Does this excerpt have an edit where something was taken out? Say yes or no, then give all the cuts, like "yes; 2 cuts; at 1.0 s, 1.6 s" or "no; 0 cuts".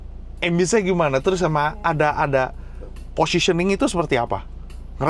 no; 0 cuts